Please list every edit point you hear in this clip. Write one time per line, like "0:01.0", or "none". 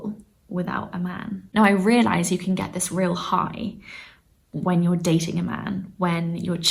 0:01.4